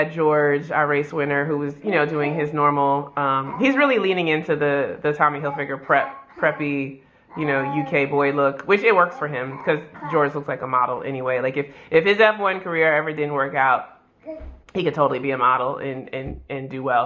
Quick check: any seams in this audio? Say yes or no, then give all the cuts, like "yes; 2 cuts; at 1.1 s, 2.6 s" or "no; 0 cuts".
no; 0 cuts